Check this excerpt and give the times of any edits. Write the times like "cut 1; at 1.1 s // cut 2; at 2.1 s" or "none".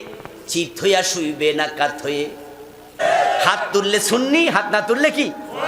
cut 1; at 3.0 s